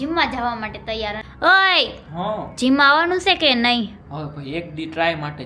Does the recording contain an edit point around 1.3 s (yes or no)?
yes